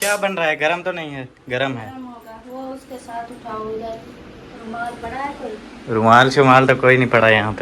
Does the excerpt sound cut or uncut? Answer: uncut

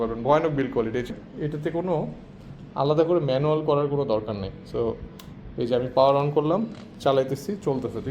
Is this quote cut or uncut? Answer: cut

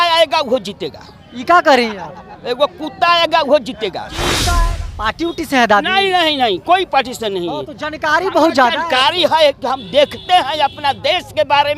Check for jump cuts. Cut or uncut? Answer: cut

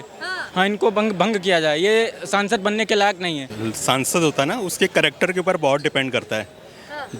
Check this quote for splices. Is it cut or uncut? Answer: cut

